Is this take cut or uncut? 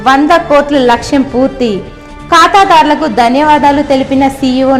uncut